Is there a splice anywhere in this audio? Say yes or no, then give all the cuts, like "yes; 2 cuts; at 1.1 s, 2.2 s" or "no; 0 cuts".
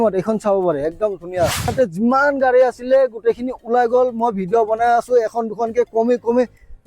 yes; 1 cut; at 1.7 s